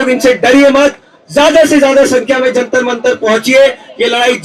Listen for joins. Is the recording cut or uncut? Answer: uncut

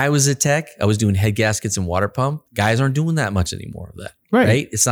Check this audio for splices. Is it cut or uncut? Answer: cut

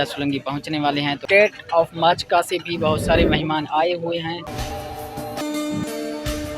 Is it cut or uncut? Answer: cut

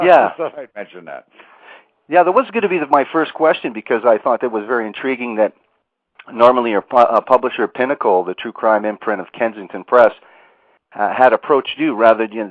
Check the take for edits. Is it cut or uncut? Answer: uncut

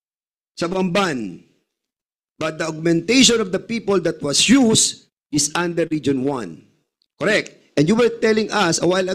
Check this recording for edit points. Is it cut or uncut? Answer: uncut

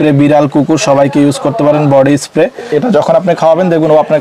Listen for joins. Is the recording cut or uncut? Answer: cut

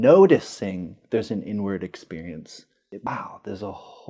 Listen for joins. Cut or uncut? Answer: cut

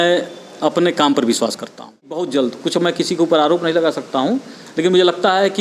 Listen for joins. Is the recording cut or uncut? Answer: cut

